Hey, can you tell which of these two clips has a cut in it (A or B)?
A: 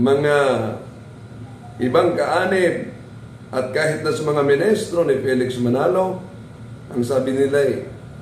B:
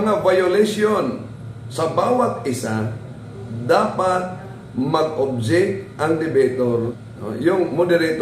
B